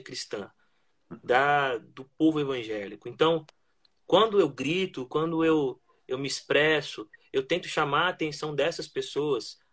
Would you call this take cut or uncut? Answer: uncut